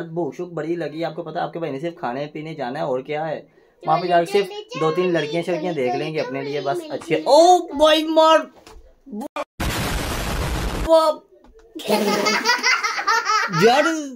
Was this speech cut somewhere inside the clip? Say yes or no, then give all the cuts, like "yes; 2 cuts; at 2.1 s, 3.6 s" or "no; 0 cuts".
no; 0 cuts